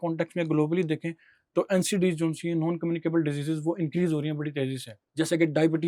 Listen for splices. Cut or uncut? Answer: uncut